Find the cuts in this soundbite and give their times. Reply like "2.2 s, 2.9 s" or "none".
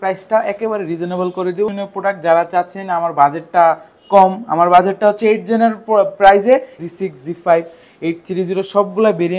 1.7 s, 6.8 s